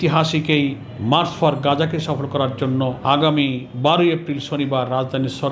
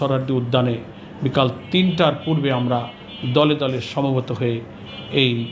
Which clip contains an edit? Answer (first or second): first